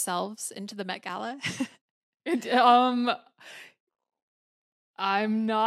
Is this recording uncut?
yes; 0 cuts

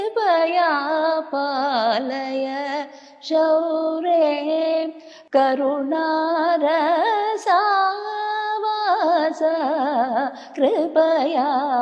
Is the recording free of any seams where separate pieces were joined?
yes; 0 cuts

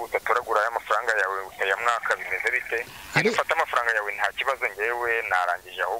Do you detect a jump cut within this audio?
no; 0 cuts

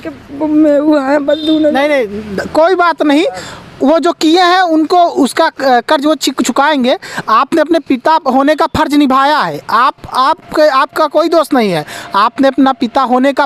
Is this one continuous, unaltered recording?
yes; 0 cuts

